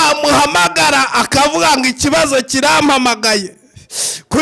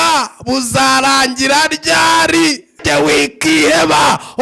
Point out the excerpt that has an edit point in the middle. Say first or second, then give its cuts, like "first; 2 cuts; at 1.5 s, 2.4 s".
second; 1 cut; at 2.8 s